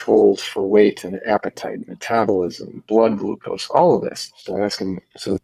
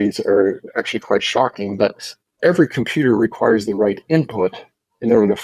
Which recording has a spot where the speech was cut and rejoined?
first; 1 cut; at 4.4 s

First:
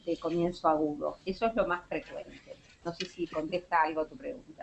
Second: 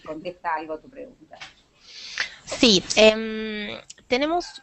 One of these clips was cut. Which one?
first; 1 cut; at 2.3 s

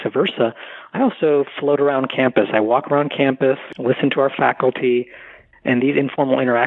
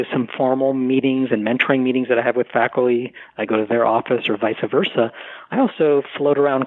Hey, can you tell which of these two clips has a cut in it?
first; 1 cut; at 3.7 s

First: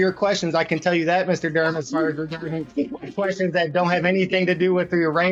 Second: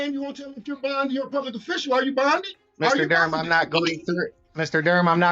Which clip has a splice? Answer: second; 2 cuts; at 2.6 s, 4.4 s

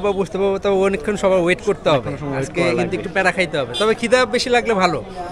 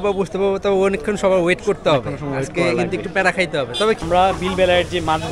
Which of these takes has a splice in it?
second; 1 cut; at 4.0 s

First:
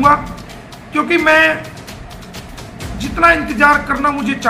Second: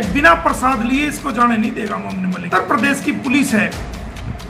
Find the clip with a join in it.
second; 1 cut; at 2.4 s

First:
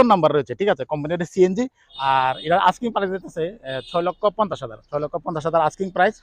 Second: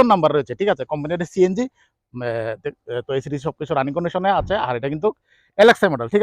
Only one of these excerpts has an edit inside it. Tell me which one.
first; 1 cut; at 1.8 s

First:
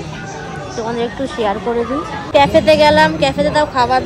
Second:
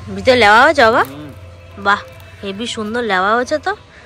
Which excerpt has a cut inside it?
first; 1 cut; at 2.3 s

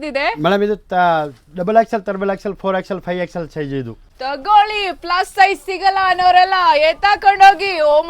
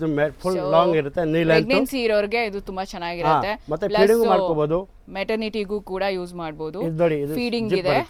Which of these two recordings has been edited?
first; 1 cut; at 4.0 s

